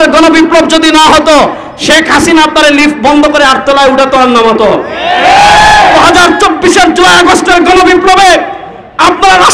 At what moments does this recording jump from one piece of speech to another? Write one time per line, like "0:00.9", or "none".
none

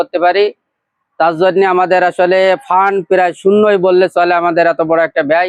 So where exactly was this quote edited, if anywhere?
none

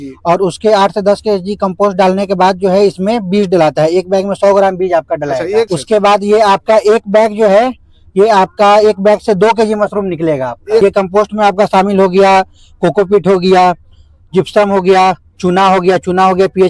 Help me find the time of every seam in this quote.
0:05.7
0:10.8

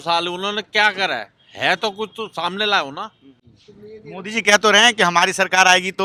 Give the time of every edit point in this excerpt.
none

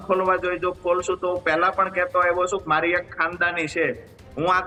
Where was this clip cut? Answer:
none

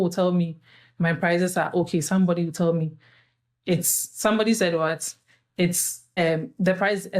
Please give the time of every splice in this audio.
0:06.0

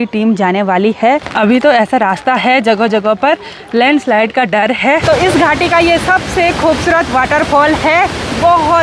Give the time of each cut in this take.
0:01.3
0:05.0

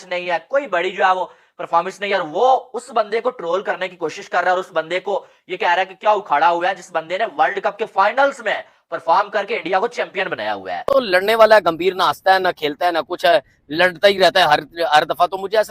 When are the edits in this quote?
0:10.9

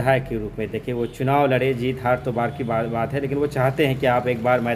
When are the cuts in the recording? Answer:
none

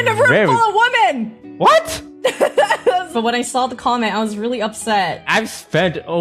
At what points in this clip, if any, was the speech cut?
0:01.4
0:03.1
0:05.3

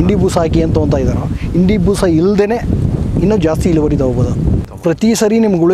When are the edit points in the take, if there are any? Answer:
0:04.7

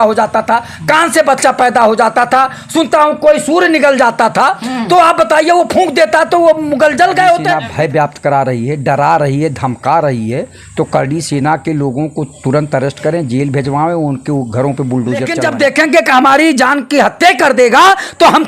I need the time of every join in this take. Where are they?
0:07.6
0:15.4

